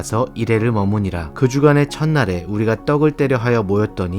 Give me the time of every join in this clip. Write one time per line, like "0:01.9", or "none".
0:01.3